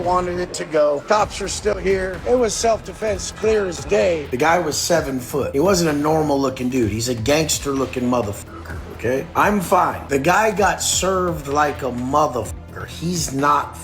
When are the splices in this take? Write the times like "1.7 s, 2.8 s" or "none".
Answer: 1.0 s, 2.2 s, 4.2 s, 5.5 s, 10.0 s